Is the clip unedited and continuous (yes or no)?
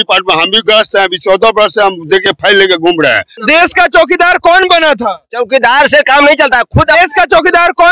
no